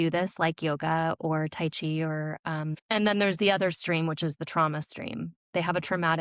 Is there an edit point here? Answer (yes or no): yes